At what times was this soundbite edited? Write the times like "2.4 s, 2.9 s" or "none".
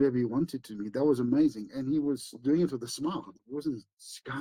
3.4 s